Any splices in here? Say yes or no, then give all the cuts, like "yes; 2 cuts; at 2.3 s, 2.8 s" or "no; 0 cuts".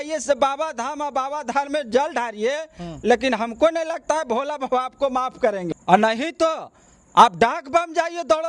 no; 0 cuts